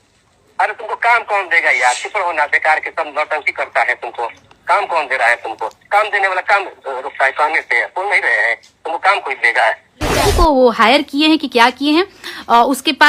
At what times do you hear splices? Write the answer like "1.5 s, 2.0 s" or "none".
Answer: 10.2 s

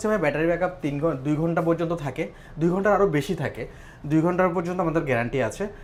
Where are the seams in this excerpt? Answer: none

